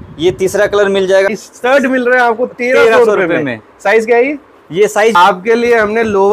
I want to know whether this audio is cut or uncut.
cut